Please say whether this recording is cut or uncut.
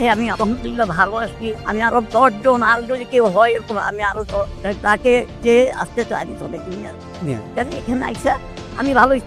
uncut